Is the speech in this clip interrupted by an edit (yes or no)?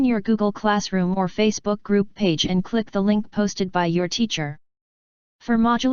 no